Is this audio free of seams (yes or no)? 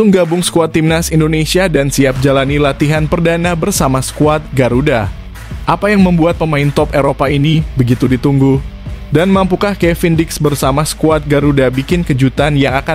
yes